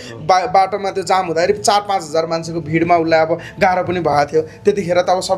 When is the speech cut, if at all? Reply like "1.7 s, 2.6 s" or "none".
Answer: none